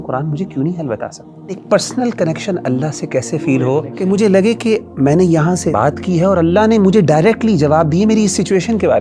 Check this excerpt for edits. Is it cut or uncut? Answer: cut